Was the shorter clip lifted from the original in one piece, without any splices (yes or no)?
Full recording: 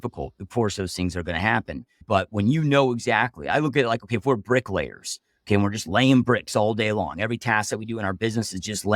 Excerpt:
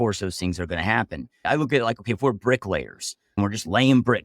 no